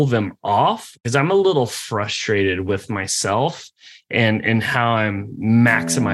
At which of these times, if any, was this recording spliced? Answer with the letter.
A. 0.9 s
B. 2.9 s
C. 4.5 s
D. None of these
A